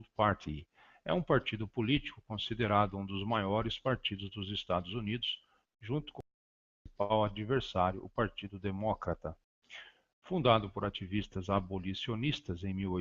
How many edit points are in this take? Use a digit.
1